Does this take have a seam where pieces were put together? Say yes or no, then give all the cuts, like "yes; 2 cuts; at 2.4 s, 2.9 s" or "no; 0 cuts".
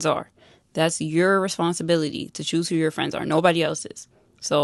no; 0 cuts